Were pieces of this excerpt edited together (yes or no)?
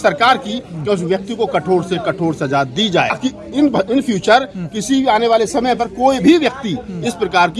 yes